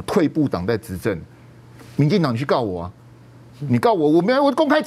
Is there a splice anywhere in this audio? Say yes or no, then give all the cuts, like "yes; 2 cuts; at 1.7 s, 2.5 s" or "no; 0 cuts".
no; 0 cuts